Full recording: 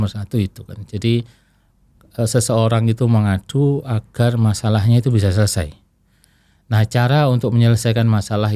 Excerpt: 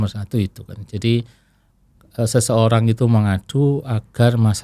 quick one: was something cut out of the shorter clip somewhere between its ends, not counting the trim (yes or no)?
no